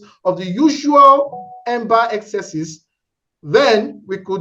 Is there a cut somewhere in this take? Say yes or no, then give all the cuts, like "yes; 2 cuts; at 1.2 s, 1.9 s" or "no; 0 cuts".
no; 0 cuts